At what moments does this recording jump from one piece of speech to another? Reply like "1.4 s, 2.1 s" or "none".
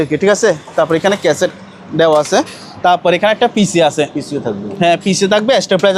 none